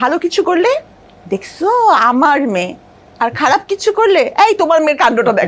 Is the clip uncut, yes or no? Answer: yes